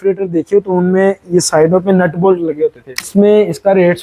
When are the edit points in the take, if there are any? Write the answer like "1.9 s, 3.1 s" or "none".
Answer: 3.1 s